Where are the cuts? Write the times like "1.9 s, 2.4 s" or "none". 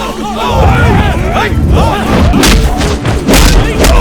2.3 s